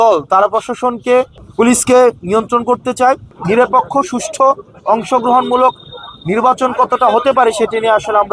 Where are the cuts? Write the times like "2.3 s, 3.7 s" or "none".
3.3 s